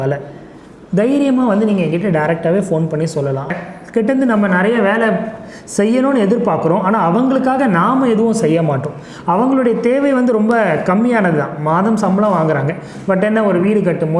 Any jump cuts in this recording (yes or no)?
yes